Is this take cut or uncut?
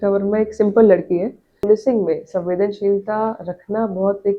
cut